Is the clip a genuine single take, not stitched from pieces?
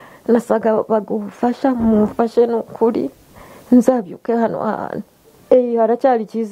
no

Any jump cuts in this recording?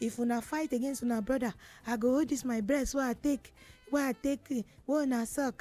no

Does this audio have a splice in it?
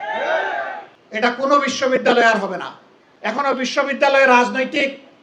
yes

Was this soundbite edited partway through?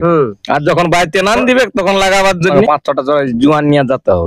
yes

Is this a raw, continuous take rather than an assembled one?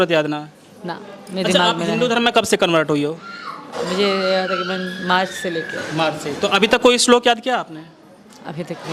yes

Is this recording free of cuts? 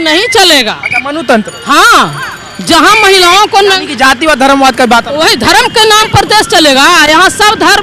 yes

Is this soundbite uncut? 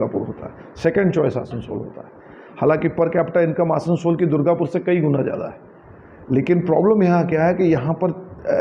yes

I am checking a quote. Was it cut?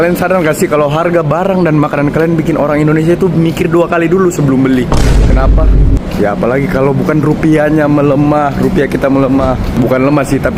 no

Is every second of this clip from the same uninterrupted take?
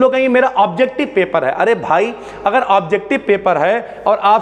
yes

